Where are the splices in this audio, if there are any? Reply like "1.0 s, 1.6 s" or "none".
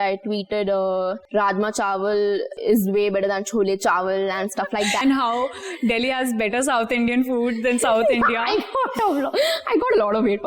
1.2 s, 2.5 s, 5.0 s